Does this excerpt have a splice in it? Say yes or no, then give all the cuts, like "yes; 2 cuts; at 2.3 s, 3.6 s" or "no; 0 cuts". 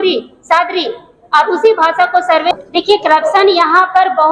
yes; 1 cut; at 2.5 s